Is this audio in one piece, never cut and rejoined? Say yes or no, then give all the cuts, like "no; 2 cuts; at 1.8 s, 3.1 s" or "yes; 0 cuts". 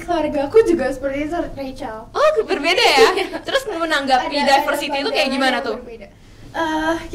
yes; 0 cuts